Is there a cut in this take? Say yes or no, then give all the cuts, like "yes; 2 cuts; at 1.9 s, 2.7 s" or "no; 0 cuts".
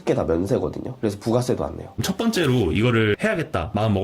yes; 2 cuts; at 1.9 s, 3.2 s